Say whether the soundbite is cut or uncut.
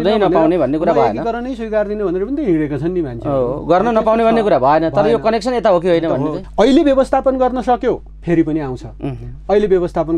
cut